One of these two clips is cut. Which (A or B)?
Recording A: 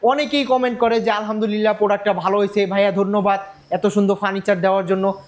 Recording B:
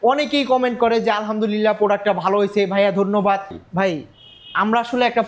B